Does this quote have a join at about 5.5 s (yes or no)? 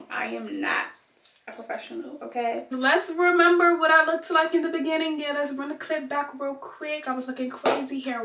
no